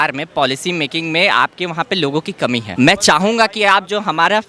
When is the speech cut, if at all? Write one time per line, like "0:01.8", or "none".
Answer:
0:02.7